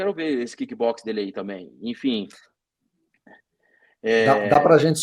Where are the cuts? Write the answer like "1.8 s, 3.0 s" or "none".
none